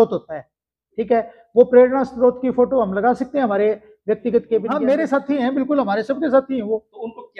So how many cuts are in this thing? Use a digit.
1